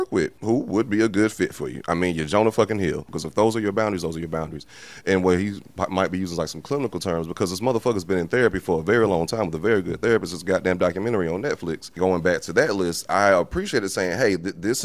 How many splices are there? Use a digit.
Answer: 2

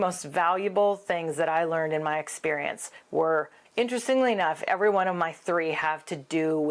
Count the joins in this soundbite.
1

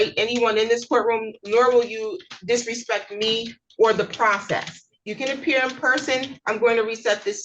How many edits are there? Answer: 0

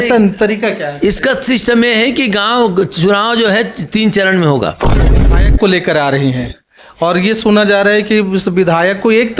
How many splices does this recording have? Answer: 1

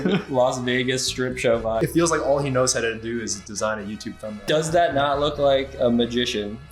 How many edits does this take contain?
2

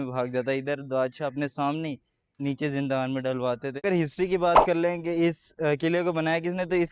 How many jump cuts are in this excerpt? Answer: 1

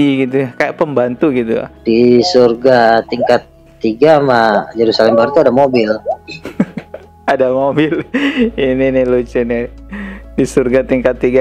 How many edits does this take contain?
1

